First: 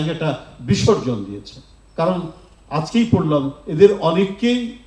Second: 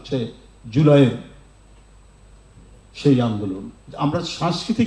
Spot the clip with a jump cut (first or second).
second